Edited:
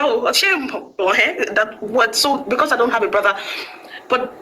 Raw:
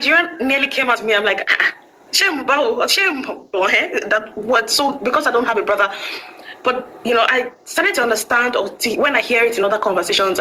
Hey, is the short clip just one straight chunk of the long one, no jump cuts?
yes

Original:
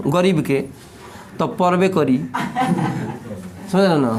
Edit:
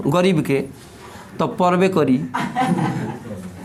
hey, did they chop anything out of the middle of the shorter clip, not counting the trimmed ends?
no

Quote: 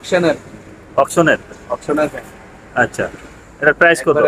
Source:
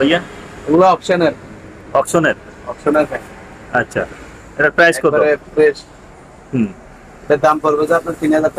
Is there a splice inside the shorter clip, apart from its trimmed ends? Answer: no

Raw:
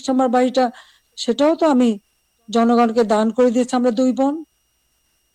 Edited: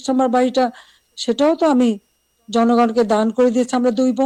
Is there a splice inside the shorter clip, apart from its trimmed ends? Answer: no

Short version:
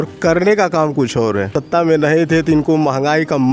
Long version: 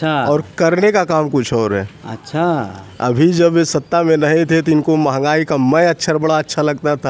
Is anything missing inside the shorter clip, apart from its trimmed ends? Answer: yes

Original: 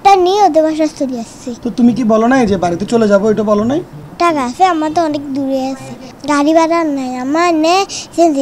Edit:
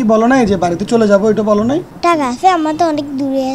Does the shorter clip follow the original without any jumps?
no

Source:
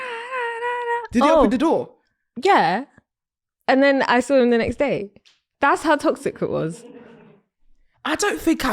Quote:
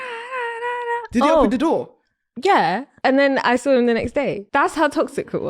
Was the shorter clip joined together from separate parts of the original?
yes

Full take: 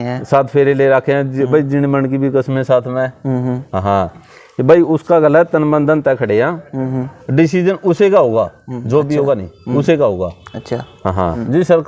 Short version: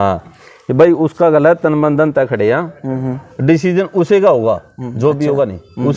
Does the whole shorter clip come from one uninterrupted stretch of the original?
yes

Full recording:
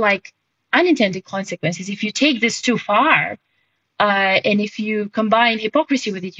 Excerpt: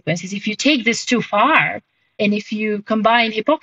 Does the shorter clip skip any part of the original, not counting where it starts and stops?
yes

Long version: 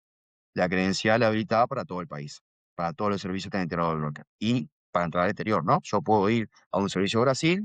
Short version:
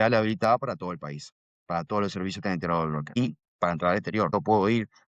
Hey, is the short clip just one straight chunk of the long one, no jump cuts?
no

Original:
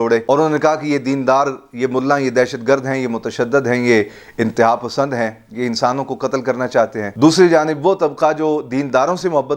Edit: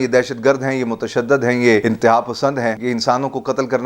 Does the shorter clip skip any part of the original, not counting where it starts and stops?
yes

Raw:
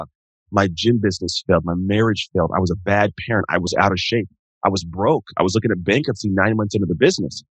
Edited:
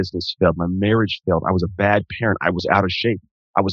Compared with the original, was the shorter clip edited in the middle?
no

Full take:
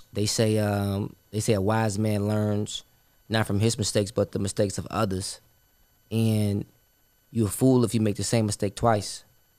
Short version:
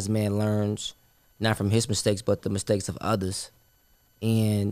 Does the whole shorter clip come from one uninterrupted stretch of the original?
yes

